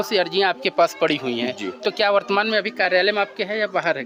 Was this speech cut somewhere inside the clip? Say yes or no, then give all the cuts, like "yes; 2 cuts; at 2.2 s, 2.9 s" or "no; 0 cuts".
no; 0 cuts